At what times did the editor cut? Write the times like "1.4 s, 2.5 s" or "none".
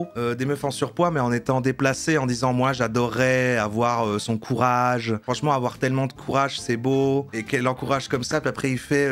5.2 s, 7.3 s